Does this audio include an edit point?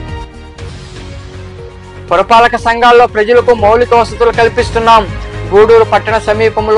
yes; 2 cuts; at 0.8 s, 2.1 s

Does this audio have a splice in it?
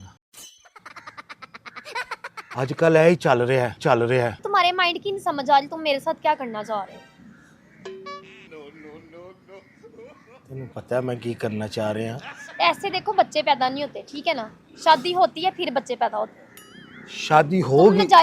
yes; 1 cut; at 4.3 s

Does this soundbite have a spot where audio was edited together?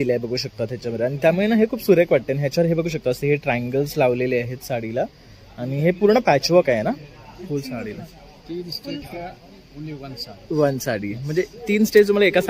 no; 0 cuts

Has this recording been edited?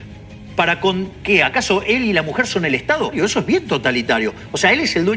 yes; 1 cut; at 3.1 s

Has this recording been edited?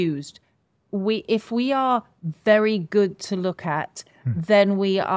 no; 0 cuts

